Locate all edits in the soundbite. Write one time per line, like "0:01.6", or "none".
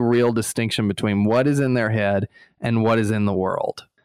none